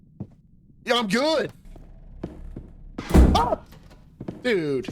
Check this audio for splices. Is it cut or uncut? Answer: cut